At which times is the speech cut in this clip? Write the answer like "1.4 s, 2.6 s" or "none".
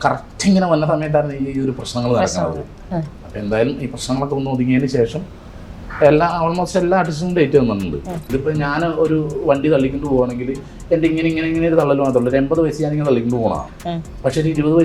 8.2 s